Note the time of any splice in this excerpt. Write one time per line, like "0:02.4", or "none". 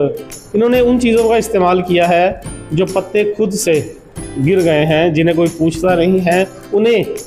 none